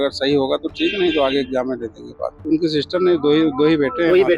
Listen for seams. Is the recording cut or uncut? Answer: cut